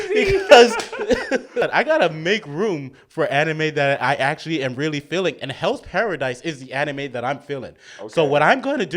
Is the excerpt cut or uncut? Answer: cut